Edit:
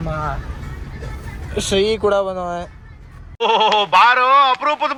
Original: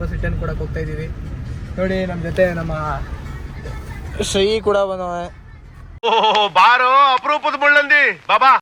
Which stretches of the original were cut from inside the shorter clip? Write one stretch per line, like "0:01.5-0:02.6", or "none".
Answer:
none